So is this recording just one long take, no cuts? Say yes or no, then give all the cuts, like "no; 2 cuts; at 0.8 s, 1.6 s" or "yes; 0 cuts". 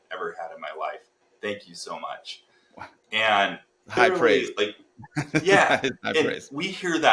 no; 1 cut; at 4.0 s